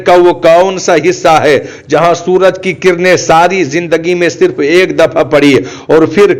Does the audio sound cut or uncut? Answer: uncut